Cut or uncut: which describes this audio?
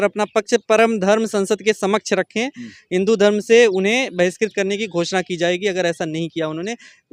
uncut